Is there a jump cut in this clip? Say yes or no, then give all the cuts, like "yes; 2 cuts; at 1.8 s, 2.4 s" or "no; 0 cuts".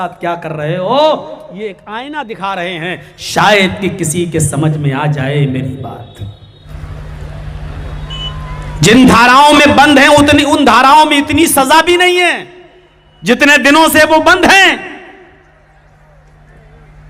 yes; 1 cut; at 6.7 s